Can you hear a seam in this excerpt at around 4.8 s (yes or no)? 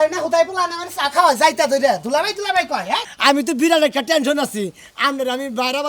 no